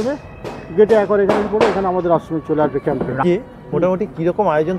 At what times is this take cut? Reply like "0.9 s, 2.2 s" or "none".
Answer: 3.2 s